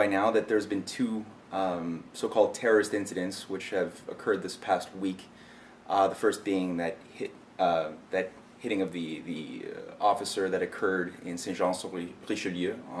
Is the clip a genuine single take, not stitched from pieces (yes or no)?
no